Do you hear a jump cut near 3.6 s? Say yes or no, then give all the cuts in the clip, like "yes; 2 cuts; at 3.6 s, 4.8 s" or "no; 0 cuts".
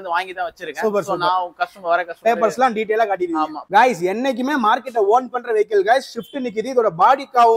yes; 1 cut; at 3.6 s